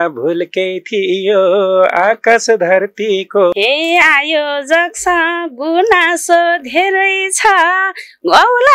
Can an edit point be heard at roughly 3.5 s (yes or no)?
yes